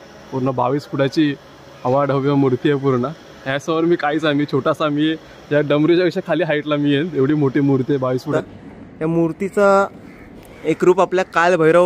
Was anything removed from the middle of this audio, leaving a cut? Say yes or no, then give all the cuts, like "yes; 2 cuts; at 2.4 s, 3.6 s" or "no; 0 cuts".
yes; 1 cut; at 8.3 s